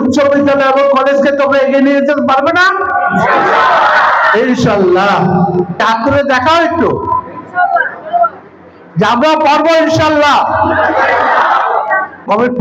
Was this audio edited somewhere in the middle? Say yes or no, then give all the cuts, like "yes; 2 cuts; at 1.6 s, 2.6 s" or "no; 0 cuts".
no; 0 cuts